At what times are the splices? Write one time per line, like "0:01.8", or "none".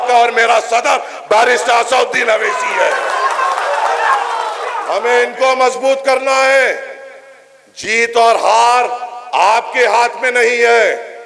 0:04.7